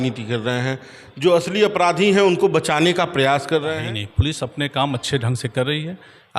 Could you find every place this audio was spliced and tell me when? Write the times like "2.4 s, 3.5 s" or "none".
3.8 s

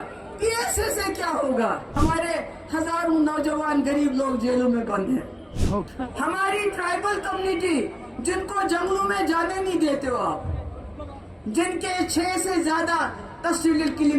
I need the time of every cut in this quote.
2.0 s, 5.6 s

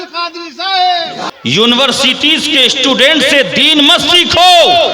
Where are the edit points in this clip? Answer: 1.2 s

